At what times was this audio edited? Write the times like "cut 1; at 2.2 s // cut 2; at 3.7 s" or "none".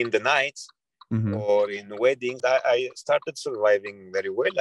cut 1; at 2.4 s